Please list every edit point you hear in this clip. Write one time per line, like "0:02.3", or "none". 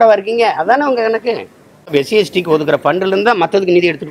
0:01.8